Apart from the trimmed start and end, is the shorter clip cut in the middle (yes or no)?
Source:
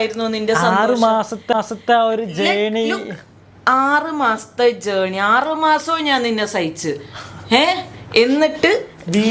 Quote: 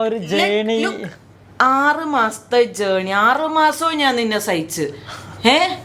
no